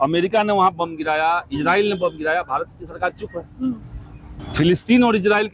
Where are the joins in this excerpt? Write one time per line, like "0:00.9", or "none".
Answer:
0:04.4